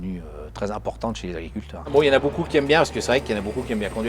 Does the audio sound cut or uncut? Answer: cut